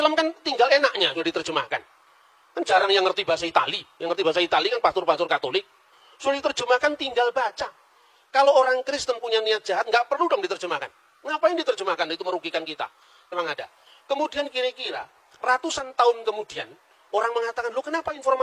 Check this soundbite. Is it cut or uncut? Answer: cut